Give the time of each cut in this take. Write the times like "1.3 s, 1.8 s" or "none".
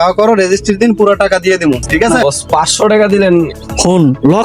2.2 s